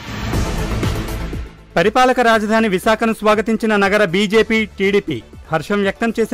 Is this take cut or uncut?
cut